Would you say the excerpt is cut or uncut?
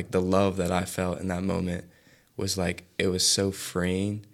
uncut